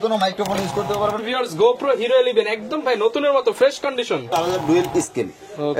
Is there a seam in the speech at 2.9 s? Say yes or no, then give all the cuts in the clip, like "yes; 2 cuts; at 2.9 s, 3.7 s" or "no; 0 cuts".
no; 2 cuts; at 1.2 s, 4.3 s